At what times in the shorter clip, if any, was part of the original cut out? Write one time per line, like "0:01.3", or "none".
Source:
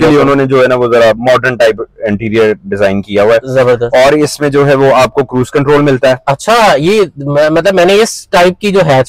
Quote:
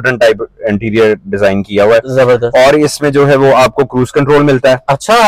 none